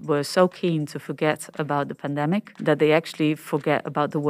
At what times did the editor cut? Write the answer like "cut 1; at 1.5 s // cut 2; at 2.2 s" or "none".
cut 1; at 2.5 s